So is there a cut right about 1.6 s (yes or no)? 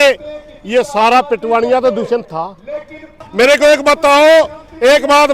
no